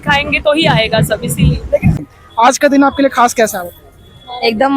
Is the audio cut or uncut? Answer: cut